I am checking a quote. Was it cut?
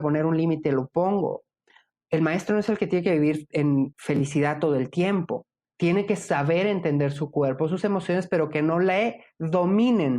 yes; 1 cut; at 5.6 s

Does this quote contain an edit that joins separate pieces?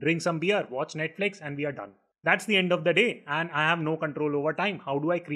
no; 0 cuts

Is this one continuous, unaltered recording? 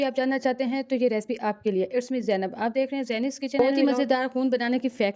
yes; 0 cuts

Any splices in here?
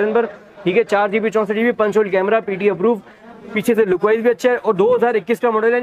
no; 0 cuts

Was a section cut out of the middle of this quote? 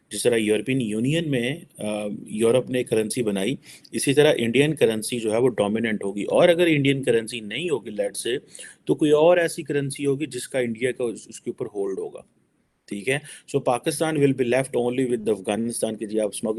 no; 0 cuts

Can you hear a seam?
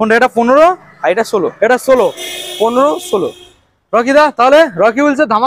no; 0 cuts

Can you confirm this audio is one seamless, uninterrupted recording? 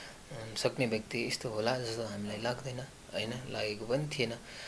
yes; 0 cuts

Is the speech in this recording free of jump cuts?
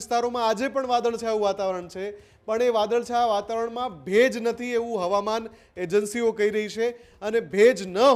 yes; 0 cuts

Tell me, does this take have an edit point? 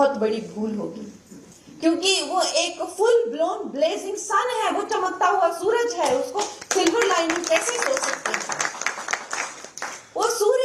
no; 0 cuts

